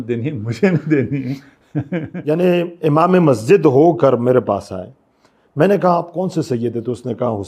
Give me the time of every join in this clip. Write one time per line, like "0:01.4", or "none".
0:02.1